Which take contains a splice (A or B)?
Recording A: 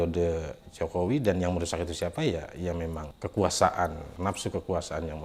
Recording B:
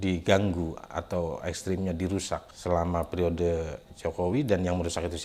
A